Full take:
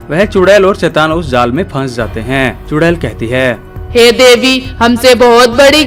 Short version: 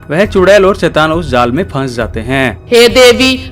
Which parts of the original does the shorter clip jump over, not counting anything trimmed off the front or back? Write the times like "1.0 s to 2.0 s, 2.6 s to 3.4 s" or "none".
2.6 s to 3.8 s